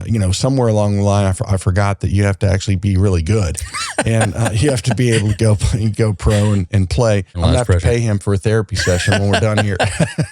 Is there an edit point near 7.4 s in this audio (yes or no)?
yes